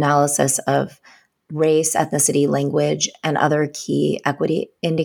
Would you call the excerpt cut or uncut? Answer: uncut